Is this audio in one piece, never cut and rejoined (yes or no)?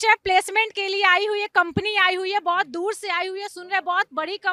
yes